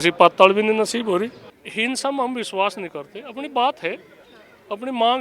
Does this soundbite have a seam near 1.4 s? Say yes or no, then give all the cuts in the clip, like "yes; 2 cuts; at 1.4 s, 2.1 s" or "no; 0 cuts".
yes; 1 cut; at 1.4 s